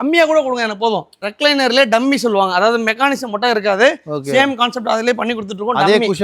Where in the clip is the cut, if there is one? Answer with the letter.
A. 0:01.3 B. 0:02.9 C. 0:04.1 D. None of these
A